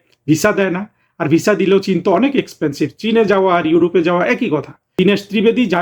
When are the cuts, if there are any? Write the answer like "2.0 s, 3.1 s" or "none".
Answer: 4.9 s